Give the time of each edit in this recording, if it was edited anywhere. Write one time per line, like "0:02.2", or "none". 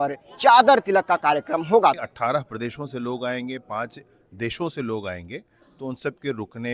0:02.0